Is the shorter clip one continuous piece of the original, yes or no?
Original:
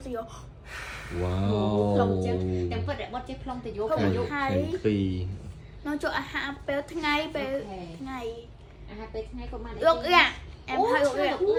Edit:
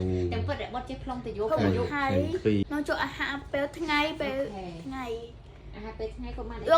no